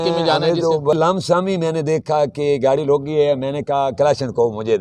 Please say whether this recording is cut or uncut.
cut